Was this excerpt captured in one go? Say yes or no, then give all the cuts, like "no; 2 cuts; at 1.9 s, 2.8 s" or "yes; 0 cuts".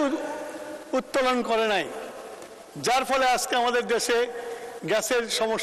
yes; 0 cuts